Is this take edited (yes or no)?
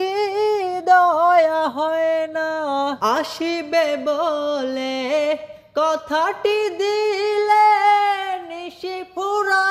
yes